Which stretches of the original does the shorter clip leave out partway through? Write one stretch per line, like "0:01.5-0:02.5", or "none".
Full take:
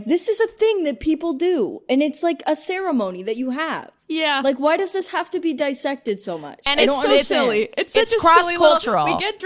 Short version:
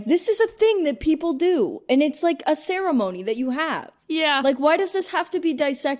none

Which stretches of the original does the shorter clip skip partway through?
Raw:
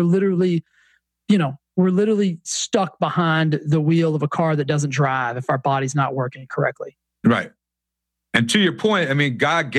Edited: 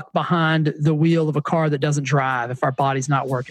none

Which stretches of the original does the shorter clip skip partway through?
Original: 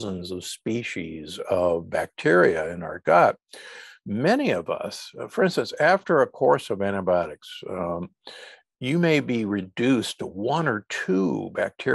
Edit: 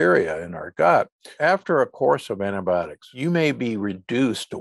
0:03.6-0:05.7
0:07.4-0:08.7

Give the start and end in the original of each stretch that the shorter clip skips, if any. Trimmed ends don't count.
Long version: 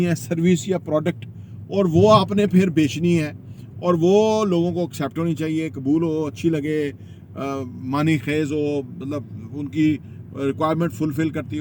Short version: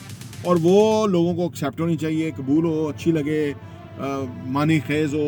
none

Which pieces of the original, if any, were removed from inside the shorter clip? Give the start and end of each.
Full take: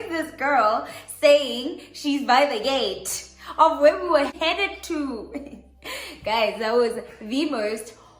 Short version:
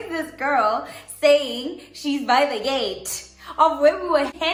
none

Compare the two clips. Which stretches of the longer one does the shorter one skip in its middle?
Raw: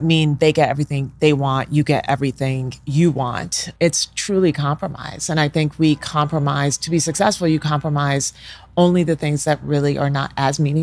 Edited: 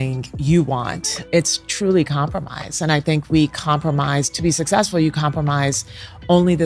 none

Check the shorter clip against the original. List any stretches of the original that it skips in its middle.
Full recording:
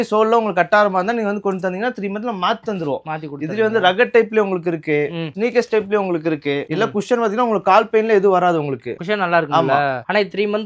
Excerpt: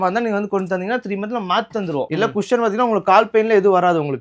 0:03.0-0:06.7

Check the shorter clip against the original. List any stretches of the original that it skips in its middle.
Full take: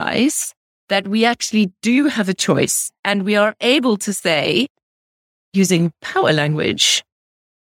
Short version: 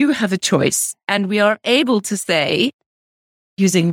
none

